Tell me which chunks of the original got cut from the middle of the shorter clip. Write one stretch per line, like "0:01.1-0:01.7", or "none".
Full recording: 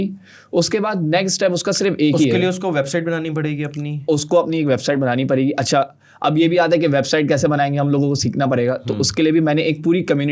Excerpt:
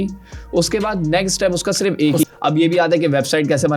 0:02.2-0:06.0